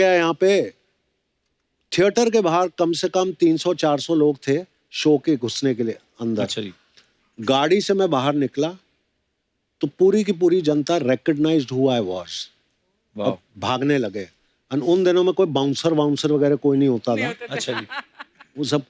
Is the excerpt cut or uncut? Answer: uncut